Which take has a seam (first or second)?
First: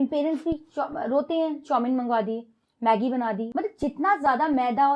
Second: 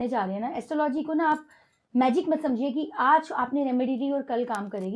first